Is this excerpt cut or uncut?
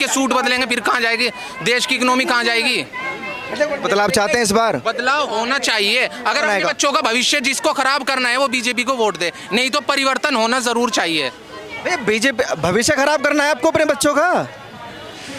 uncut